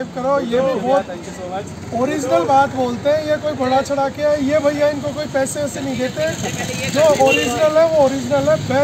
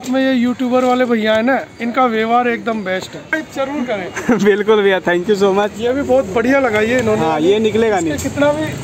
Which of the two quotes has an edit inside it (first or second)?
second